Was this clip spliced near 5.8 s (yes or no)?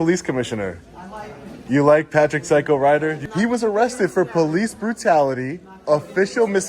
no